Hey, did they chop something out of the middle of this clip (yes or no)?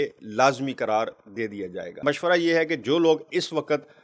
yes